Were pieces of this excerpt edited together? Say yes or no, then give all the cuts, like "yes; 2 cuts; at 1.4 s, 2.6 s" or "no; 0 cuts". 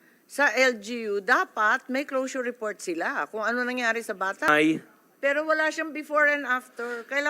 yes; 1 cut; at 4.5 s